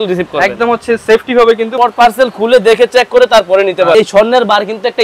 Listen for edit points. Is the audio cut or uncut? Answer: cut